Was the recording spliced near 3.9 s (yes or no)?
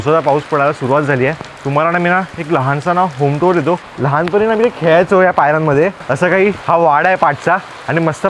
yes